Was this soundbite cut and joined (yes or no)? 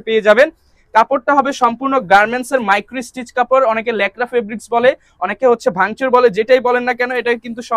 no